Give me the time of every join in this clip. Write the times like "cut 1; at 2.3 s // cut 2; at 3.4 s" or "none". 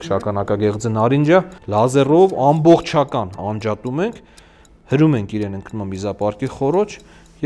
cut 1; at 1.6 s // cut 2; at 3.4 s